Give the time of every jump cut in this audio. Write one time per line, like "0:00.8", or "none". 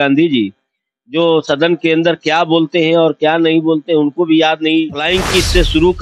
0:05.0